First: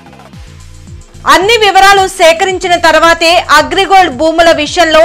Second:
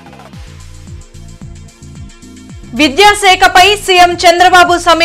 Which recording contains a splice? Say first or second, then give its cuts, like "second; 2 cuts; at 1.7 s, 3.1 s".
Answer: second; 1 cut; at 1.0 s